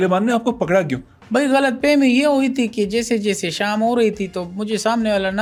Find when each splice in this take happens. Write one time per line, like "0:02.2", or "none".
none